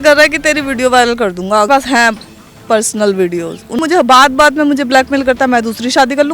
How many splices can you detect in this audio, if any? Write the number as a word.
two